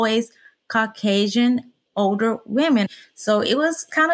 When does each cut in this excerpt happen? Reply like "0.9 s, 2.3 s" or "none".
1.8 s, 2.9 s